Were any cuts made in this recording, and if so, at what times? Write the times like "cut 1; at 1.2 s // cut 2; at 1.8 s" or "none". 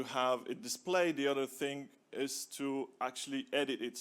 none

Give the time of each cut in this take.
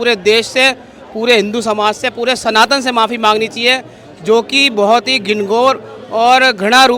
none

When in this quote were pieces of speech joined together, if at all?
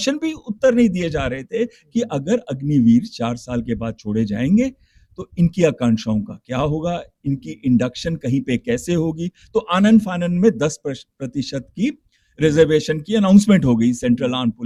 none

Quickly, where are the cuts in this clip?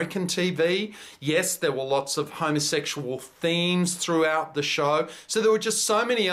none

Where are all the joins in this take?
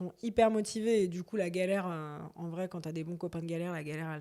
none

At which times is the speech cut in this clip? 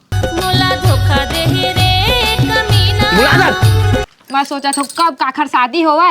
cut 1; at 4.2 s

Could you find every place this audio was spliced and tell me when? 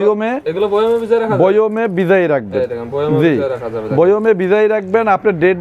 none

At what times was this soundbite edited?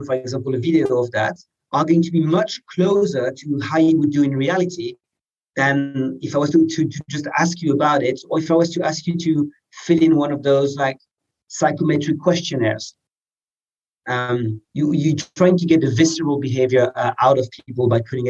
none

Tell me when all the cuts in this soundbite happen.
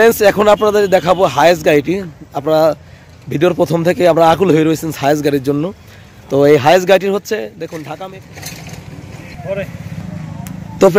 cut 1; at 8.0 s

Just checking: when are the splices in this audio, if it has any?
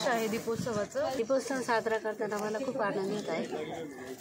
cut 1; at 1.2 s

